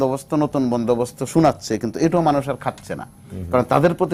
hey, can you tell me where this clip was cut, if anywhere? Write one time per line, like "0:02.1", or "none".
none